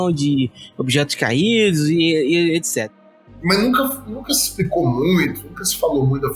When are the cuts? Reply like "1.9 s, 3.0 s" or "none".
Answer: 2.8 s

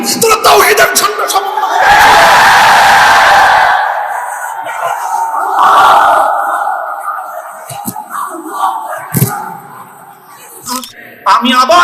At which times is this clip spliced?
10.8 s

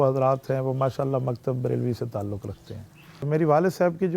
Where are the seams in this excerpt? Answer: 3.2 s

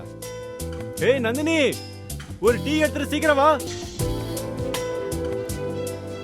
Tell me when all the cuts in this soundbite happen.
3.7 s

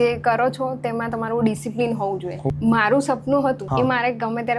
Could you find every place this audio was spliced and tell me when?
2.5 s, 3.6 s

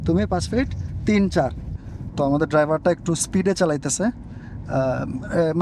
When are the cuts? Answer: 1.7 s

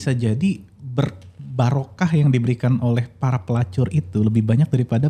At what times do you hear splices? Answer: none

